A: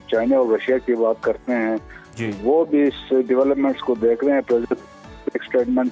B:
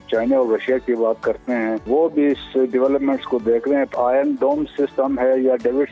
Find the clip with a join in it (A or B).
B